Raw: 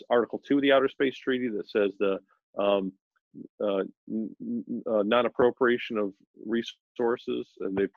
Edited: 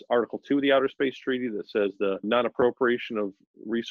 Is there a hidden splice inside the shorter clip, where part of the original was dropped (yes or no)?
yes